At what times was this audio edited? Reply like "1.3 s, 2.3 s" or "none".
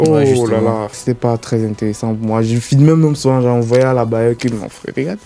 0.9 s